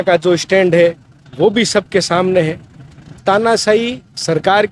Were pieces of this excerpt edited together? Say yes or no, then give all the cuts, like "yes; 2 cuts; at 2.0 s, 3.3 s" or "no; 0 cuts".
yes; 1 cut; at 3.2 s